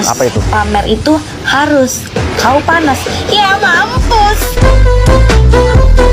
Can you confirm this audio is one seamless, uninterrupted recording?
yes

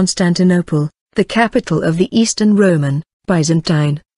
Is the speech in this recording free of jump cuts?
yes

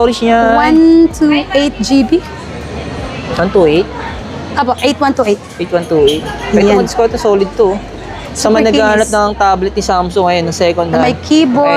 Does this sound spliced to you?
no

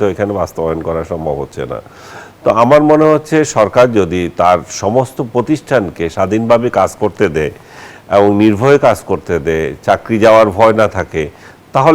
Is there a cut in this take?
no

